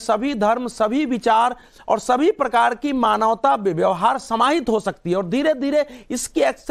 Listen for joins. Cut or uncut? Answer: uncut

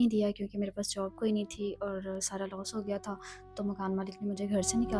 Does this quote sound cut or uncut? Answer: uncut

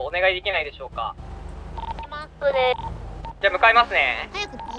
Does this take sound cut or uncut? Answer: uncut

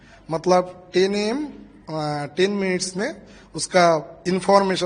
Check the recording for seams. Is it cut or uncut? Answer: uncut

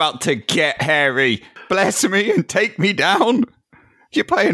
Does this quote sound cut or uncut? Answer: cut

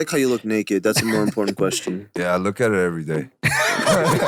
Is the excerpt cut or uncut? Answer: uncut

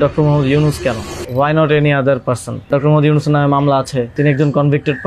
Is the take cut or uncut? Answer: cut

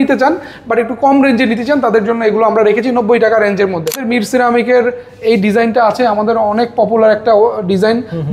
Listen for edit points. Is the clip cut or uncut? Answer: cut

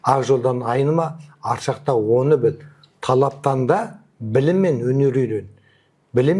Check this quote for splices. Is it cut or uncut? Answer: uncut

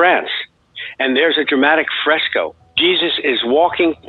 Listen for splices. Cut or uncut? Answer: cut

